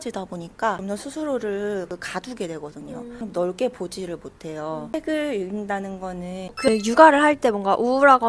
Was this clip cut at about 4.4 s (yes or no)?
no